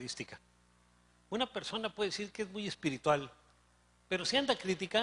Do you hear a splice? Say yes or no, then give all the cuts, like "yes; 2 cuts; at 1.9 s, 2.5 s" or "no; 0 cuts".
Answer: yes; 1 cut; at 1.3 s